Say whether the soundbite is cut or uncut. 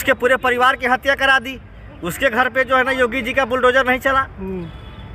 uncut